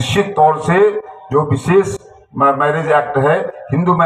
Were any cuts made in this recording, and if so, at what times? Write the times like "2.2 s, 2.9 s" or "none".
none